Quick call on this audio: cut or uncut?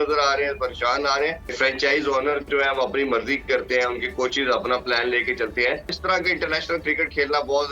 cut